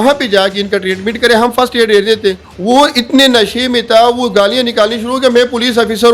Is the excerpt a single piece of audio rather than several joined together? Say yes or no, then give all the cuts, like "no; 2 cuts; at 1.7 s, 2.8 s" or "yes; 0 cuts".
no; 1 cut; at 2.5 s